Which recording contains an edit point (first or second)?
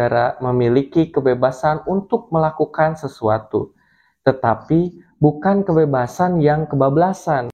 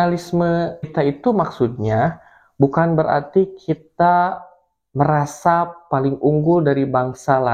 second